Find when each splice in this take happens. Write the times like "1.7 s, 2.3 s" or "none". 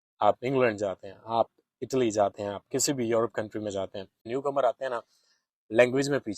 4.3 s